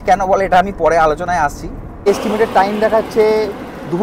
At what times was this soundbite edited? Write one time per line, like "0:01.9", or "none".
0:01.9